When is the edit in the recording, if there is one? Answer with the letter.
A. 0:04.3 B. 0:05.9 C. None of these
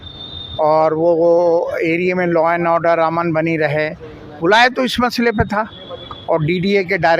C